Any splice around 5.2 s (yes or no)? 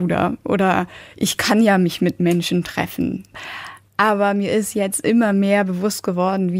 no